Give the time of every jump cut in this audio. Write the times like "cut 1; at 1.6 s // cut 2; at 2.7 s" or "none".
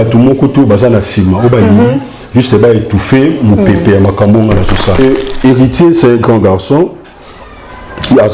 cut 1; at 5.0 s